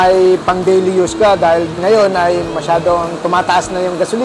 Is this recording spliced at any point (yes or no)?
no